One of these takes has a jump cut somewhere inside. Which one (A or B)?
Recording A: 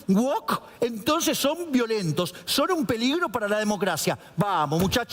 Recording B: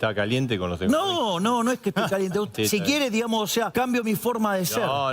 B